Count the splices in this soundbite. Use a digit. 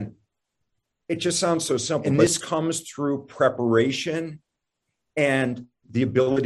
1